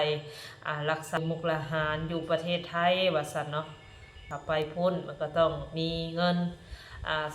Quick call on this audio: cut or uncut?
cut